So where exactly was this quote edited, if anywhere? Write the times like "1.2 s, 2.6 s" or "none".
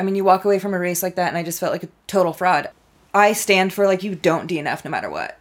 2.7 s

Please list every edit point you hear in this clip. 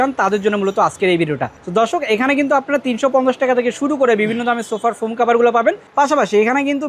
none

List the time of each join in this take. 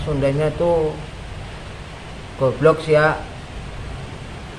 none

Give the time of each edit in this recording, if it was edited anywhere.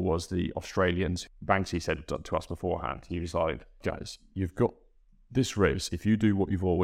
1.2 s, 3.8 s

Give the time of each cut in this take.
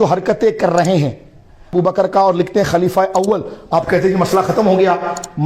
1.7 s

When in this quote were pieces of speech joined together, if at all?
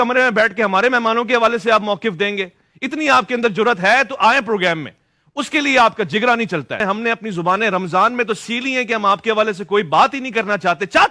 none

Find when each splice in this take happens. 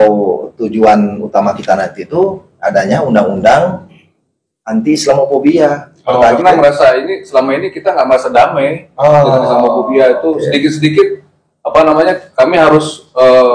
6.3 s

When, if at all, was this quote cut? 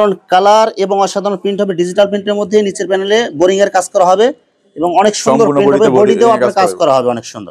none

